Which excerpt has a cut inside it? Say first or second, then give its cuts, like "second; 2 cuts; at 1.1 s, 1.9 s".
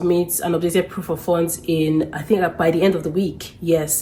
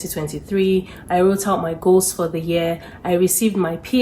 second; 1 cut; at 2.9 s